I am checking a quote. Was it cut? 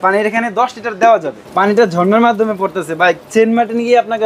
yes; 1 cut; at 1.4 s

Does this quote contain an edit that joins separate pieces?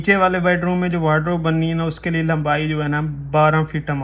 no; 0 cuts

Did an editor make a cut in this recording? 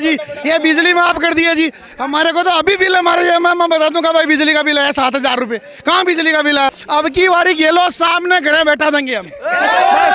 yes; 1 cut; at 6.7 s

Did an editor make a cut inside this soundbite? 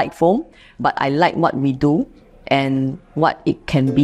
no; 0 cuts

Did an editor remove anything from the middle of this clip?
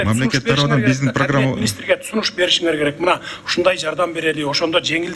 no; 0 cuts

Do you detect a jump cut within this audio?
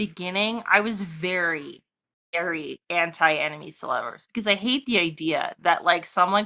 no; 0 cuts

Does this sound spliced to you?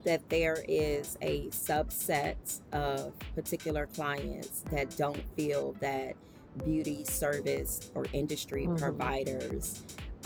no; 0 cuts

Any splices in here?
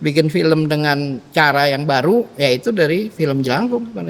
no; 0 cuts

